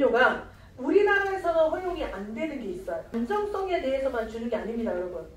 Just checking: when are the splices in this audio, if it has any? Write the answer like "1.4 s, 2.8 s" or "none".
3.1 s